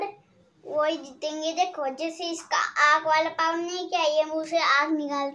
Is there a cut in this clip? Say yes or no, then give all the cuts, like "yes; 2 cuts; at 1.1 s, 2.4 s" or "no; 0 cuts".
no; 0 cuts